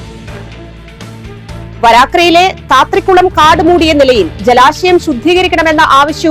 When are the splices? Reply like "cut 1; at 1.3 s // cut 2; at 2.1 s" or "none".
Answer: cut 1; at 1.2 s